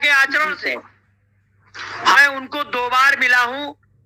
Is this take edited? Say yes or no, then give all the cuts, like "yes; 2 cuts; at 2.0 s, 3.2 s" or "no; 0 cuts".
no; 0 cuts